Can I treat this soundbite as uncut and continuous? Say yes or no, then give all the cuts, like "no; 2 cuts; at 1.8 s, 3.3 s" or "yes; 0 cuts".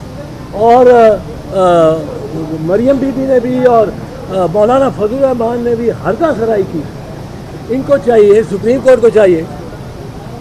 yes; 0 cuts